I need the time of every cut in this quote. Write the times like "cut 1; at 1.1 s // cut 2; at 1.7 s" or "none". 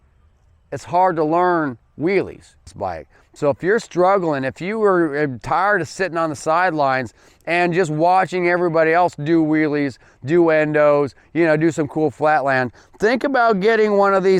cut 1; at 2.7 s